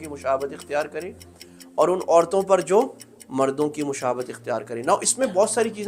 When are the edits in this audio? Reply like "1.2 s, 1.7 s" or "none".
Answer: none